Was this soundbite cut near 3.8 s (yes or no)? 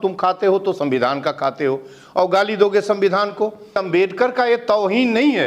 yes